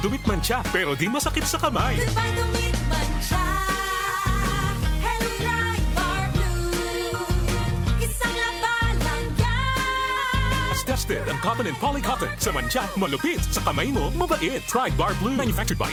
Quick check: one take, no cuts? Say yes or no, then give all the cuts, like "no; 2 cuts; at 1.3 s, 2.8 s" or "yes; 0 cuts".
yes; 0 cuts